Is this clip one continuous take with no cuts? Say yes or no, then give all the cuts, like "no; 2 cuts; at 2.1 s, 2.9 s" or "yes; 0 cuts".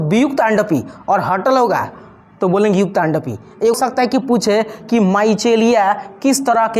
no; 1 cut; at 3.8 s